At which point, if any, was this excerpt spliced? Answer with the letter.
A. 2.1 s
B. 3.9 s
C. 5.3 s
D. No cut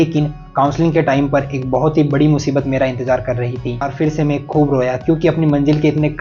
B